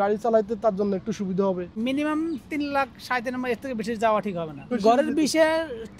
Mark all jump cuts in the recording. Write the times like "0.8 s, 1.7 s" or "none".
1.7 s, 4.8 s